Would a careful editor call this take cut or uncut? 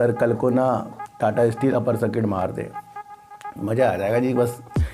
uncut